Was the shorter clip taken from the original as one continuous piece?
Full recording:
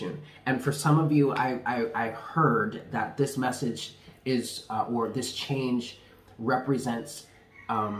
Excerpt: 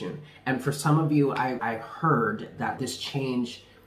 no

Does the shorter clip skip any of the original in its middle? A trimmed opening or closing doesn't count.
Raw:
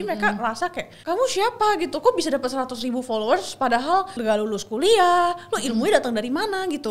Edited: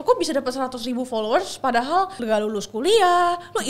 no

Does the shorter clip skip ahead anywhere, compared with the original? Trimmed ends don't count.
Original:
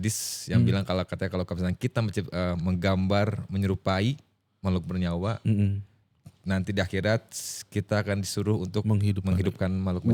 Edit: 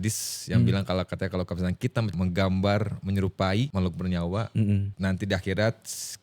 yes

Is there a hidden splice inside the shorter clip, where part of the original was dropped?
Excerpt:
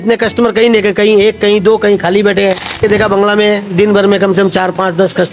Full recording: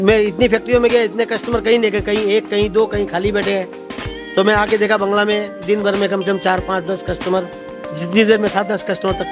yes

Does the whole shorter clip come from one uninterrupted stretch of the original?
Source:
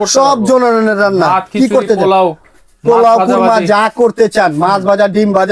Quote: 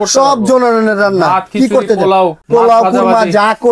no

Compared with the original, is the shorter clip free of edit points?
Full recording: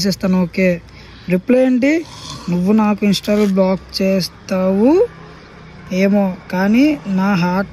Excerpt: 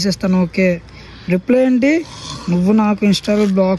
yes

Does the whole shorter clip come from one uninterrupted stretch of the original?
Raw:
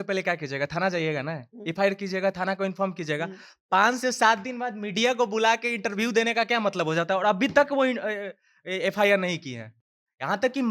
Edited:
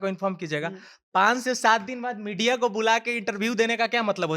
yes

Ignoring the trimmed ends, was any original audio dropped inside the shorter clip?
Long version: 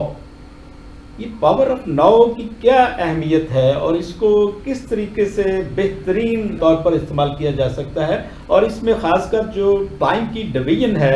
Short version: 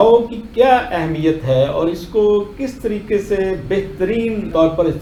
no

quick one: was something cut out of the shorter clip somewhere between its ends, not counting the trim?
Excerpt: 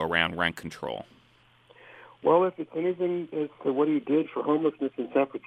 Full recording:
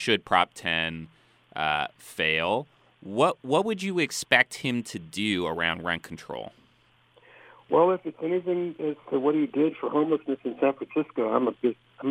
no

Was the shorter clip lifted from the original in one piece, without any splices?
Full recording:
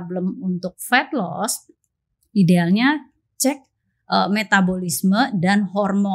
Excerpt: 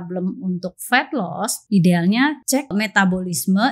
no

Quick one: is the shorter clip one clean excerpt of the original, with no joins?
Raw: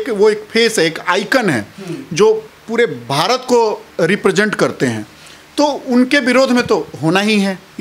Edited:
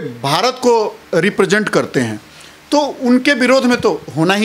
yes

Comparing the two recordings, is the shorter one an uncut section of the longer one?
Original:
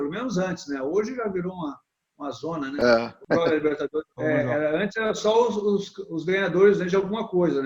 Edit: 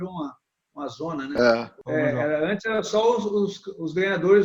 no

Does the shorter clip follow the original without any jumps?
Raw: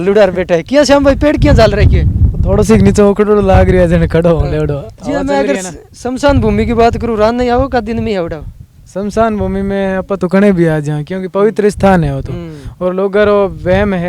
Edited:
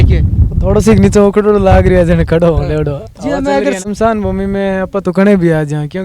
no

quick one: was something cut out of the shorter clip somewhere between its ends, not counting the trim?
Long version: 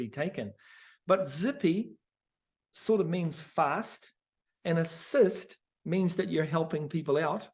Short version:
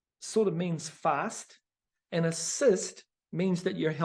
no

